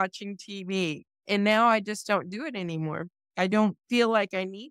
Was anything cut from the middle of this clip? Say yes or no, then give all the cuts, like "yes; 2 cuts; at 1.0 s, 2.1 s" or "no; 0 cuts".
yes; 1 cut; at 1.1 s